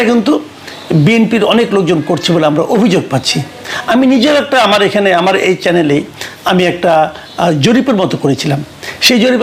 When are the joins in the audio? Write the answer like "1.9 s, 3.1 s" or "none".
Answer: none